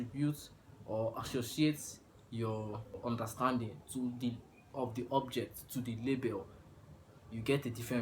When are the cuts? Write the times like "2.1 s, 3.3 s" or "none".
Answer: 3.0 s